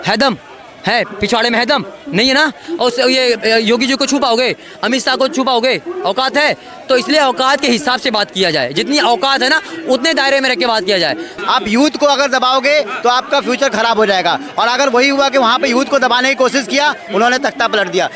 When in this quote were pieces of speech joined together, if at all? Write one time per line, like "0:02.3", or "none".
0:11.3